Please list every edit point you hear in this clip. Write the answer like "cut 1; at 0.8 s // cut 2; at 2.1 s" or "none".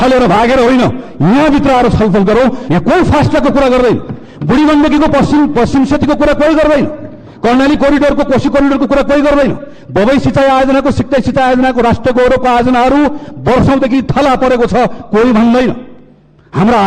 cut 1; at 2.6 s